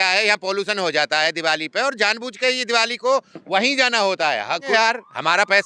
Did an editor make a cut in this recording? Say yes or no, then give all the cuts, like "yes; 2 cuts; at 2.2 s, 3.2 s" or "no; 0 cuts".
yes; 1 cut; at 4.7 s